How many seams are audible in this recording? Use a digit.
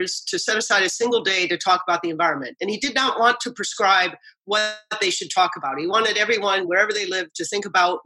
0